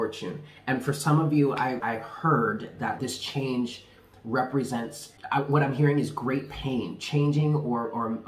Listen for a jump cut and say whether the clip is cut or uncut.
cut